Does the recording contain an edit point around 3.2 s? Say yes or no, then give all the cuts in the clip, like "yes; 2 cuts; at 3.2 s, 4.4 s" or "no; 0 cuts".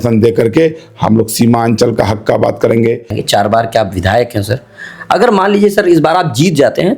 yes; 1 cut; at 3.2 s